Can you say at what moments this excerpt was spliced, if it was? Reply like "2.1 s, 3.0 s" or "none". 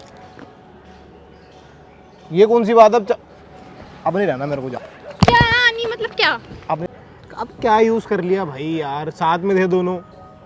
6.9 s